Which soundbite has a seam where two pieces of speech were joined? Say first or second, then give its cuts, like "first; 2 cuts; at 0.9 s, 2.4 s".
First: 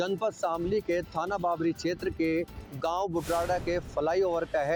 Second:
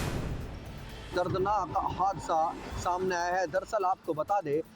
second; 1 cut; at 1.0 s